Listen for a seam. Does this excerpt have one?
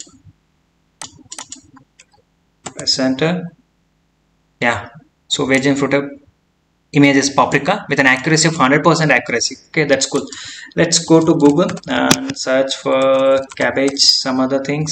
no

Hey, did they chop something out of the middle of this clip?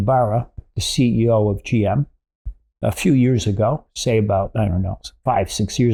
no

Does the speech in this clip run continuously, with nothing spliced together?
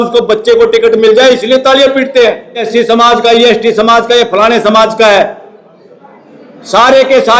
no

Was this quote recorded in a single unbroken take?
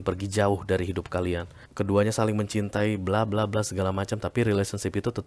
no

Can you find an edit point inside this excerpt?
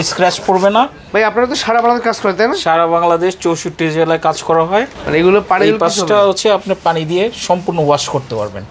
yes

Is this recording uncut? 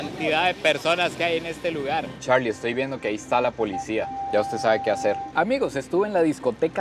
no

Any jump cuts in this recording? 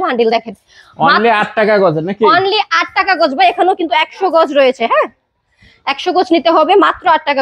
no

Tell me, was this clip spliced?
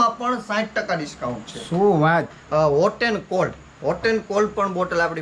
yes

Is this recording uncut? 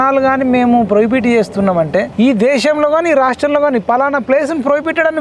no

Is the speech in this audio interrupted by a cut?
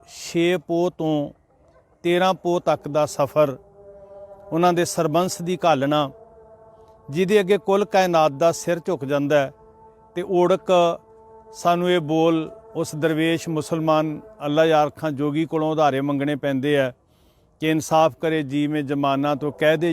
yes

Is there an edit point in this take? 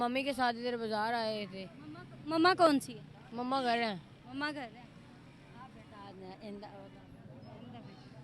no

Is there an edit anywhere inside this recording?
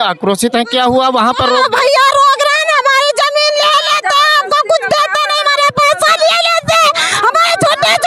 no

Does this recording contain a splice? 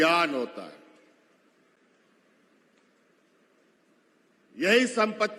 no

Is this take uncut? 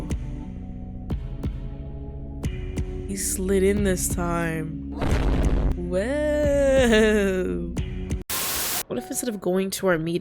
no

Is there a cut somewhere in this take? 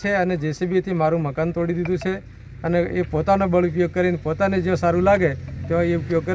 no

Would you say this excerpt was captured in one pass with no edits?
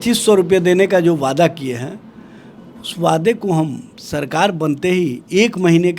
yes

